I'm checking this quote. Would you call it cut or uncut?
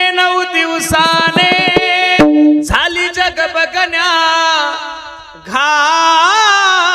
cut